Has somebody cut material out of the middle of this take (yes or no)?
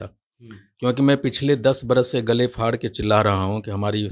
no